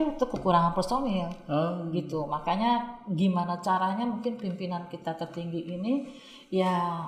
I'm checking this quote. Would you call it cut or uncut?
uncut